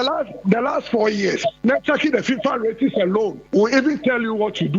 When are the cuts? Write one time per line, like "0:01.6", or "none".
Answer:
0:01.6
0:03.4

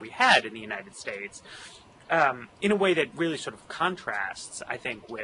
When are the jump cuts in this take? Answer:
0:04.1

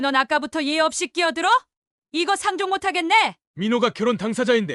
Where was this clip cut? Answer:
0:03.4

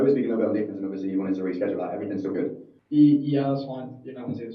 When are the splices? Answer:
0:02.7

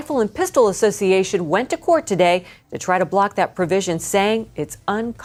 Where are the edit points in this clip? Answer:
none

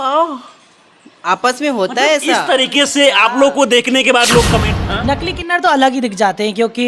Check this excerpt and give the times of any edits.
0:04.7

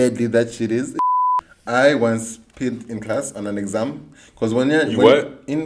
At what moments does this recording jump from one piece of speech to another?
0:01.0

